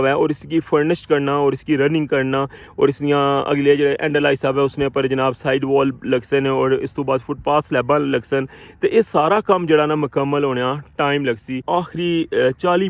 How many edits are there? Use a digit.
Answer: 1